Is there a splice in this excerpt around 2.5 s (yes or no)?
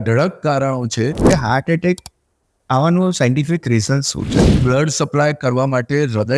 no